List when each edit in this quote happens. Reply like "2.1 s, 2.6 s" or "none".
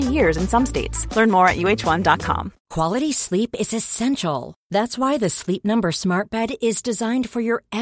2.6 s